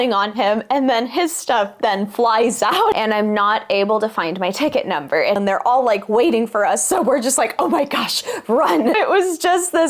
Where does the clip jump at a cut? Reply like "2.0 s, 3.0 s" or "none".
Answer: 2.9 s, 5.4 s, 8.9 s